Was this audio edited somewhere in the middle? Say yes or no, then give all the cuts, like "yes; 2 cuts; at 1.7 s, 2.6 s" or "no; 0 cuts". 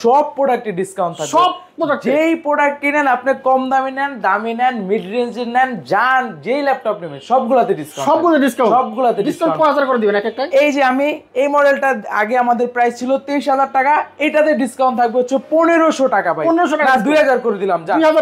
no; 0 cuts